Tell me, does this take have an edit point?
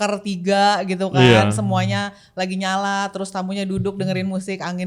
no; 0 cuts

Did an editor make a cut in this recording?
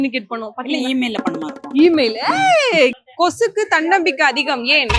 yes; 1 cut; at 3.0 s

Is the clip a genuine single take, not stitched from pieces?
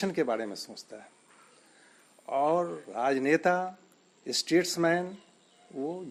yes; 0 cuts

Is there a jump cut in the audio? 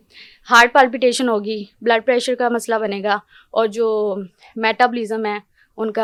no; 0 cuts

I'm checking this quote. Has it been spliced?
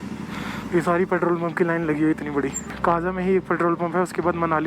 yes; 1 cut; at 2.7 s

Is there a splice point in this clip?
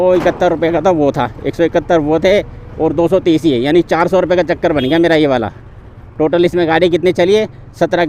no; 0 cuts

